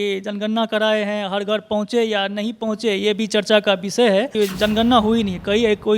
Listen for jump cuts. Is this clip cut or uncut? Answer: cut